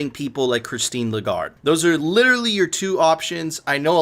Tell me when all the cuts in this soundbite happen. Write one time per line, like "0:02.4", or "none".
0:01.6